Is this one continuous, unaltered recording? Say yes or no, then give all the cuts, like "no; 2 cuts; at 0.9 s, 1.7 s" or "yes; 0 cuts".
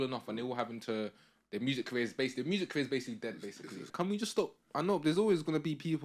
no; 1 cut; at 3.9 s